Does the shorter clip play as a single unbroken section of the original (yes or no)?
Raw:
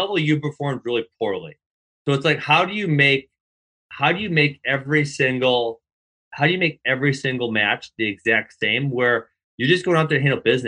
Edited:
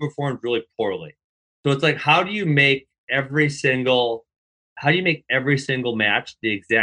no